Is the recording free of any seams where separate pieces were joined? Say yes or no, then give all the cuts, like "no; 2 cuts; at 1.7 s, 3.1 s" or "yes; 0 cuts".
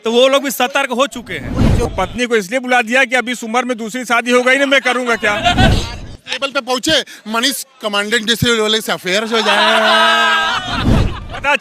no; 2 cuts; at 1.8 s, 5.7 s